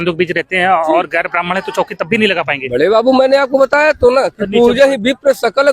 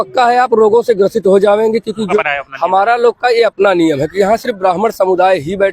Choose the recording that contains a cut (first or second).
second